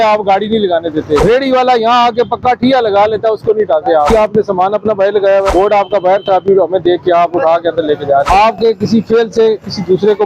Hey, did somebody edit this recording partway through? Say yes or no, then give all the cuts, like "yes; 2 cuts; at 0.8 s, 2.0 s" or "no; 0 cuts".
yes; 4 cuts; at 1.2 s, 4.1 s, 5.5 s, 8.3 s